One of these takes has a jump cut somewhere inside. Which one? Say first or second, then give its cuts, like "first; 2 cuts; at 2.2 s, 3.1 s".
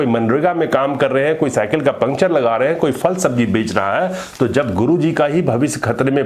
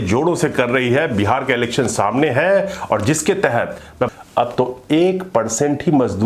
second; 1 cut; at 4.1 s